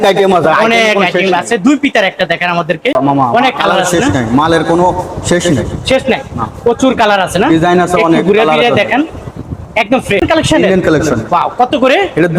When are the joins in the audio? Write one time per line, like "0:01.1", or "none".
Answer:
0:02.9
0:10.2